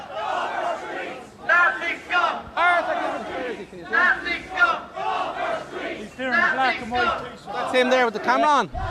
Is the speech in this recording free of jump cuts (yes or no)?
yes